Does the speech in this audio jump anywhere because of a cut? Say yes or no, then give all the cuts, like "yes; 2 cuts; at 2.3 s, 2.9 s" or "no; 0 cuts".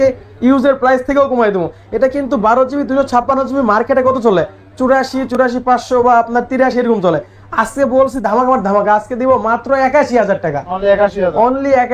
no; 0 cuts